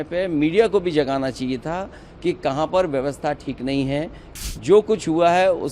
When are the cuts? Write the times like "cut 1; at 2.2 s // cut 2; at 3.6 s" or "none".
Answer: cut 1; at 4.2 s